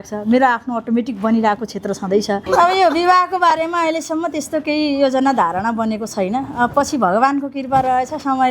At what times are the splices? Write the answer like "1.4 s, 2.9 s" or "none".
2.4 s